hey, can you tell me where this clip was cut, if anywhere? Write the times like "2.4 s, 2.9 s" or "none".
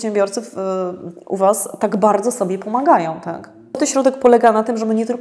3.8 s